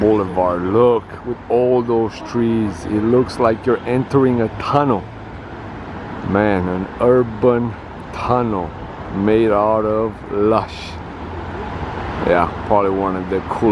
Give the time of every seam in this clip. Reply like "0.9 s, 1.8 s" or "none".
none